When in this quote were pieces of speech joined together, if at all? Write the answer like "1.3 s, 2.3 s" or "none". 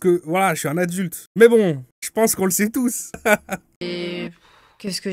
3.6 s